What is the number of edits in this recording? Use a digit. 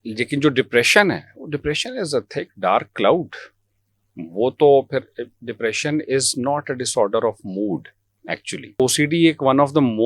1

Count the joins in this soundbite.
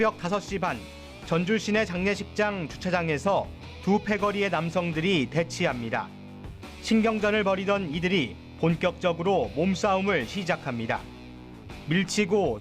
1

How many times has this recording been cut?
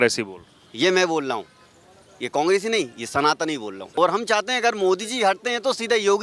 1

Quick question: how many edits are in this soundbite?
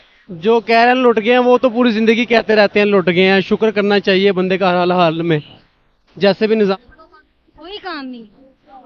1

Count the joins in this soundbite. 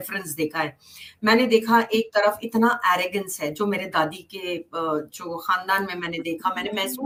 0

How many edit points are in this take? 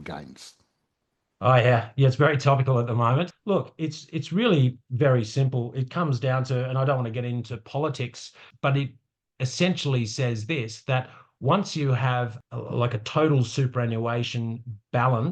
3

